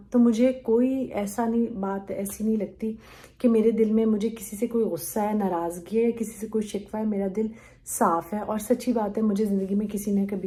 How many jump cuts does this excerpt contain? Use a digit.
0